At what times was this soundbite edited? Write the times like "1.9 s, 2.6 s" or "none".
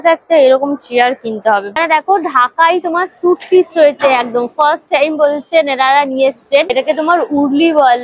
1.8 s, 6.8 s